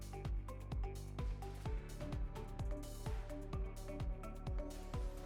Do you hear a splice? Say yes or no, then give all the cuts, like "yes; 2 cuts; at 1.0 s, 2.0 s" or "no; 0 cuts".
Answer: no; 0 cuts